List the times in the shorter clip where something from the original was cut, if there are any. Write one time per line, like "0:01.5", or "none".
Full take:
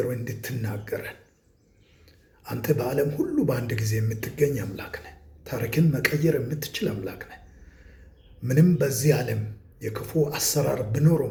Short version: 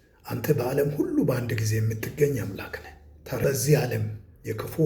0:03.4